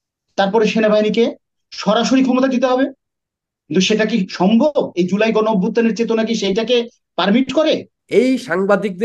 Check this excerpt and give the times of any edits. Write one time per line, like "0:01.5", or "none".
0:07.9